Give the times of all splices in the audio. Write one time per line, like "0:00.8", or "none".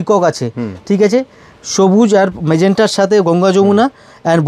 none